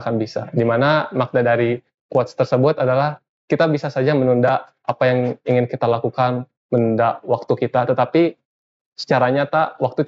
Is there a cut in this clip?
no; 0 cuts

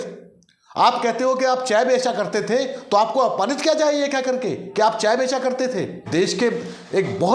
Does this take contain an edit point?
yes; 1 cut; at 6.1 s

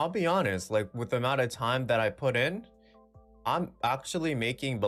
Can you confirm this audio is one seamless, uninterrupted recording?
yes; 0 cuts

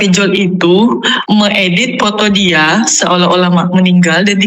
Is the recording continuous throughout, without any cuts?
no; 1 cut; at 1.1 s

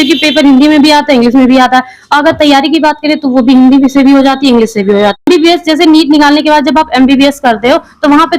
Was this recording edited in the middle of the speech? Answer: yes; 1 cut; at 5.3 s

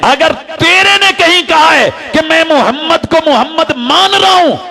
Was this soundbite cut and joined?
no; 0 cuts

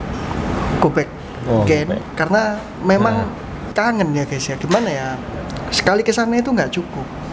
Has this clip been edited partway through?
no; 0 cuts

